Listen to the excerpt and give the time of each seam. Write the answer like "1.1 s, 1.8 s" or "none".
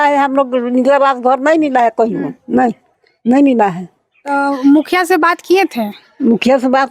none